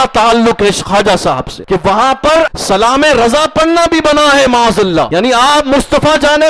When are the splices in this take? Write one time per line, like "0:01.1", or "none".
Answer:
0:01.5
0:02.6
0:05.1